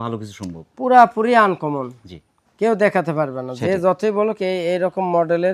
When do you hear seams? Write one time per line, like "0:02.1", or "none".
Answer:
none